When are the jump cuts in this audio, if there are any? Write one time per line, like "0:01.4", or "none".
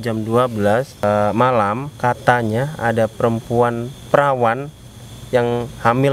0:01.0
0:01.9
0:03.9